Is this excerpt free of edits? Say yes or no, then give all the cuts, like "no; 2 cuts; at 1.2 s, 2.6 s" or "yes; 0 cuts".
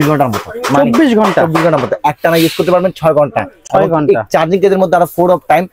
yes; 0 cuts